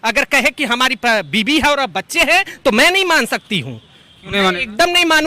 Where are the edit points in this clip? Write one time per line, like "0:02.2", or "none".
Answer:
none